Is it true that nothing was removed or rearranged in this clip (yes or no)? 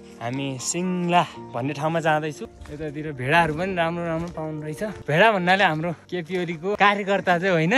no